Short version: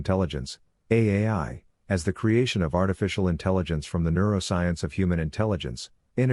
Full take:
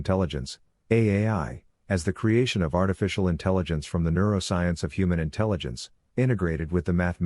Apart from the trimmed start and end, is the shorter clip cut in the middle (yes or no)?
no